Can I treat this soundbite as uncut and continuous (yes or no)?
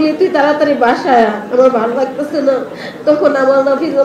yes